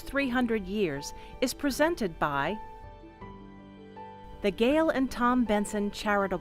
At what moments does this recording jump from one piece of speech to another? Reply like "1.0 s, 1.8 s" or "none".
none